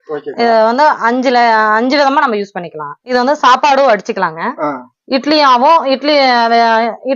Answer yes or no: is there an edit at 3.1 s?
yes